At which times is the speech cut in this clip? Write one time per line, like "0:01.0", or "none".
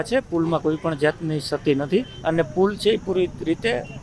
0:02.1